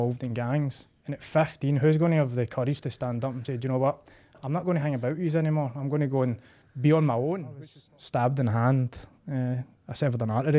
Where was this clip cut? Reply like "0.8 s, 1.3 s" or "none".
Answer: 7.7 s